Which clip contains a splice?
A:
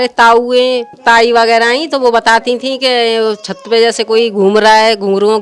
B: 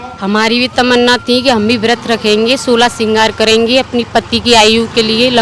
A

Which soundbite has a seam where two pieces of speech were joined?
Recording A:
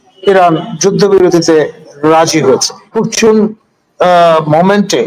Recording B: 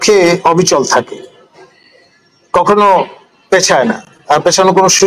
A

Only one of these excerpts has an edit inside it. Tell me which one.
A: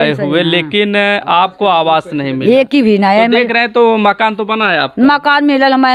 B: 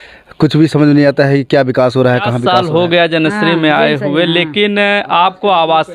B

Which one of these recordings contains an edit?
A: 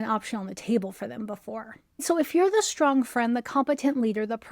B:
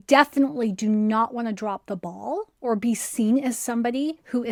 A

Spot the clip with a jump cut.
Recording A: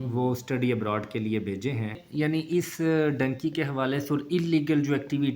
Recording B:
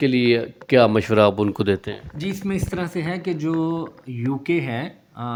A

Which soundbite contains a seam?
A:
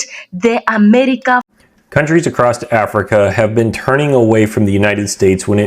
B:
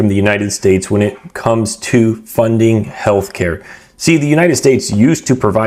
A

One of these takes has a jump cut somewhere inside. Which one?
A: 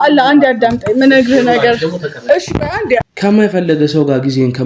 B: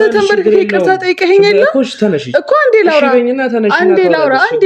A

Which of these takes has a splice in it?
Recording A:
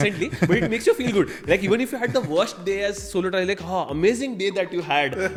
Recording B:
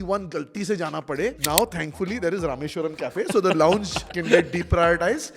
B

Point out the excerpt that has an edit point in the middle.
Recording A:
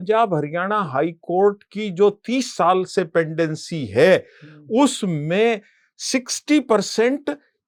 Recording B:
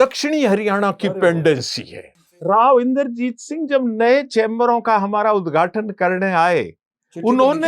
B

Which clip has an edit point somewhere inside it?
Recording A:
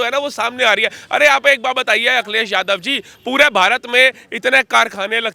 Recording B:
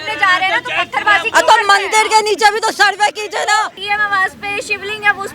B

